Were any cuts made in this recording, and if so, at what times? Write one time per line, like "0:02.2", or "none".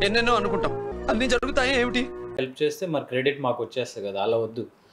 0:02.4